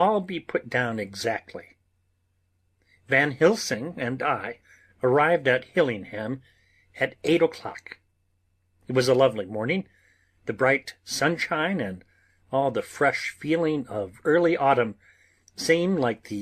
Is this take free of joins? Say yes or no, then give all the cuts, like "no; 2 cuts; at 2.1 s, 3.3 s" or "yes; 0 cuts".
yes; 0 cuts